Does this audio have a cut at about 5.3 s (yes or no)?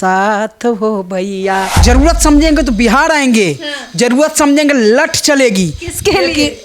no